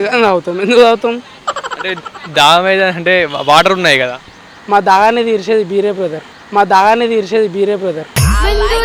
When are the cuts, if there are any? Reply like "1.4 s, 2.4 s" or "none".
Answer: none